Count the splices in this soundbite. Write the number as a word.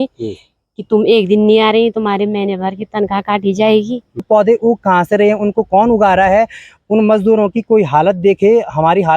one